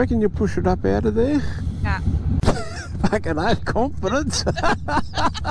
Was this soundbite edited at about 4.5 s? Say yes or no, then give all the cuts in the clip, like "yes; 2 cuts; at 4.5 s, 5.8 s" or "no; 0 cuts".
no; 1 cut; at 2.4 s